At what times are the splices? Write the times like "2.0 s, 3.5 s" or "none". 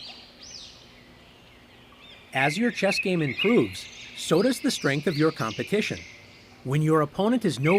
2.3 s